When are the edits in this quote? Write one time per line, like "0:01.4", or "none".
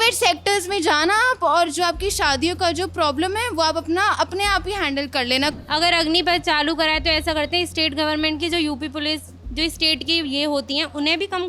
none